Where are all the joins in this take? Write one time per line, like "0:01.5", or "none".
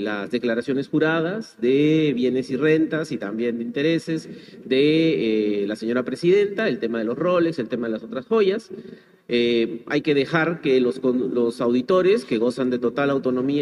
none